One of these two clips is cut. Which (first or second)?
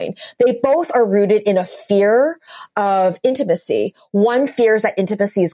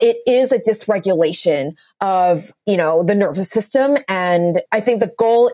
second